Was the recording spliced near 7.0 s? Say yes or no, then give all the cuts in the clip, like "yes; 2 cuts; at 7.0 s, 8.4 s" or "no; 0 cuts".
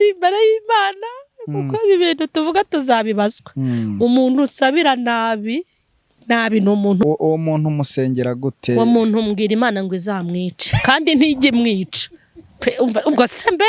yes; 1 cut; at 7.0 s